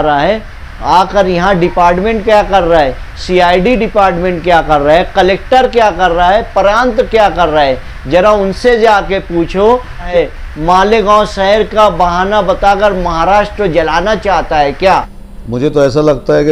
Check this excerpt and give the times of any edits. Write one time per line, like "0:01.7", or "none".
0:10.1
0:15.2